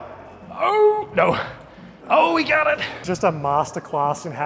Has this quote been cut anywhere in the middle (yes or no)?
yes